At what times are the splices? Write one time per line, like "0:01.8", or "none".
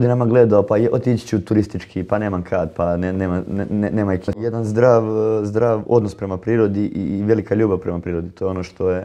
0:04.4

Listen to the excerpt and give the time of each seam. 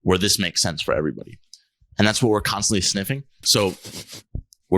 0:03.4

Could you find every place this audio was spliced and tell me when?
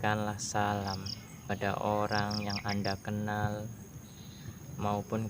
0:01.5

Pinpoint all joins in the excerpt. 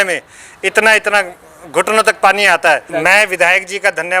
0:02.9

